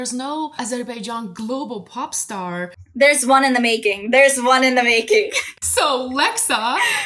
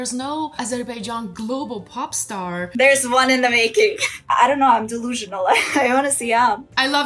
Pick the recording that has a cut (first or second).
second